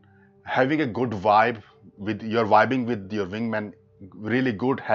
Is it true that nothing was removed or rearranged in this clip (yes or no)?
yes